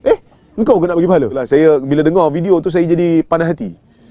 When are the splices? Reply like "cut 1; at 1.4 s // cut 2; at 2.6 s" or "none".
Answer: cut 1; at 1.4 s